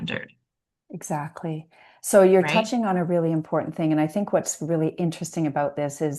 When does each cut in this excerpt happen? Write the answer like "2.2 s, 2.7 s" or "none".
none